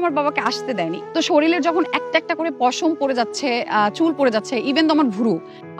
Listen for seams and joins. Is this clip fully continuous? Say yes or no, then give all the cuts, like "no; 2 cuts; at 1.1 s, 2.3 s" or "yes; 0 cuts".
no; 1 cut; at 1.0 s